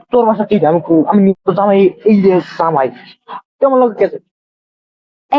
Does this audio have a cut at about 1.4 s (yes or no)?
yes